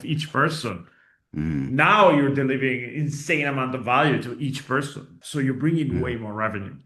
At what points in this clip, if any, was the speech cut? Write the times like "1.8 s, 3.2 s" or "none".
5.2 s